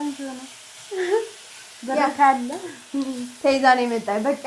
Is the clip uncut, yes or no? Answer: yes